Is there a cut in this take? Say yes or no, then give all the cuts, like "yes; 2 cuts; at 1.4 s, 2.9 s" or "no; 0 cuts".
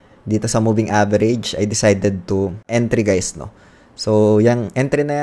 yes; 1 cut; at 2.6 s